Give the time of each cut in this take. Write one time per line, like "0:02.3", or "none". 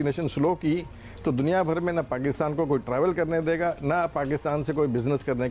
none